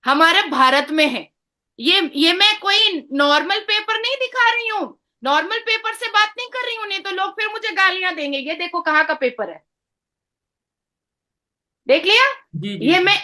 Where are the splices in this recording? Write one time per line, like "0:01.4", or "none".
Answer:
none